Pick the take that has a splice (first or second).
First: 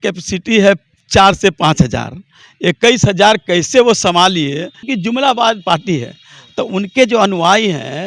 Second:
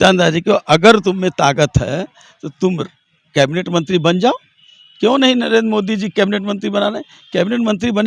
first